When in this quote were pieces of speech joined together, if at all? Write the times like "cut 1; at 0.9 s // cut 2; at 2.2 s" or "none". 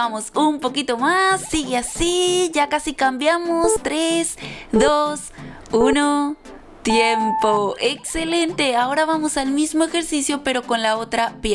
none